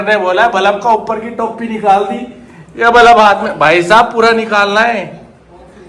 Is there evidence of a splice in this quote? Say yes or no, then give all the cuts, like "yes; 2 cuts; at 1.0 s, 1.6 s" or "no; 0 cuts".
no; 0 cuts